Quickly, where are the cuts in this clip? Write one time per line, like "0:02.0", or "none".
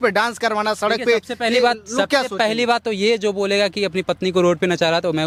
none